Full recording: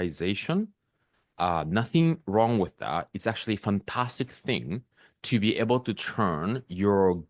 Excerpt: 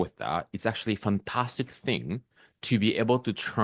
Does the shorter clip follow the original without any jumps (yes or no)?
yes